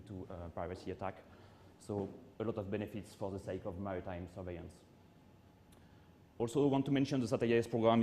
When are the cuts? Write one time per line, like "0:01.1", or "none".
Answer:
0:00.9

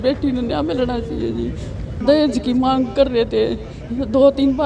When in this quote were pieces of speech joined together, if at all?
0:02.0

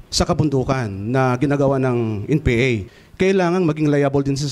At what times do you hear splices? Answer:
0:02.9

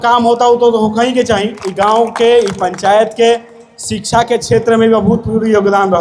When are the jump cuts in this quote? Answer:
0:01.6

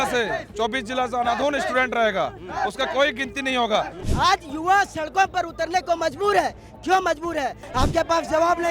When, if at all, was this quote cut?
0:04.0
0:07.6

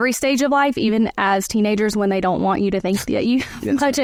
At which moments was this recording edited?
none

